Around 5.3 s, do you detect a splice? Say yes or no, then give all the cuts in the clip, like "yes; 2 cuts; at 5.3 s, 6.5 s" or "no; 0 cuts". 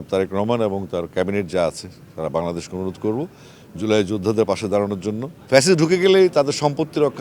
yes; 1 cut; at 5.3 s